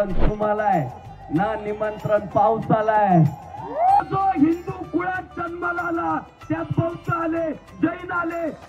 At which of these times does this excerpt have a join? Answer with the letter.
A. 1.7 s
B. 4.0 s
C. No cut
B